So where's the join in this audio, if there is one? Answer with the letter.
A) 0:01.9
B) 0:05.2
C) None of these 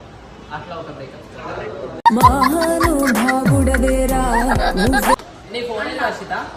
B